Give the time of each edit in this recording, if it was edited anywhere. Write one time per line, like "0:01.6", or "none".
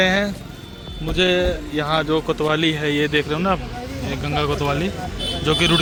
none